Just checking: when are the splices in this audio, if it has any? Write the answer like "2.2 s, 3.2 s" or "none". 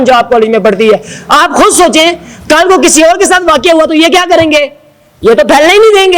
none